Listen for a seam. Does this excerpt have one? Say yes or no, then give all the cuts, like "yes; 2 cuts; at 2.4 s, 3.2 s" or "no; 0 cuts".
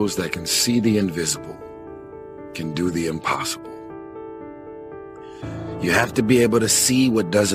no; 0 cuts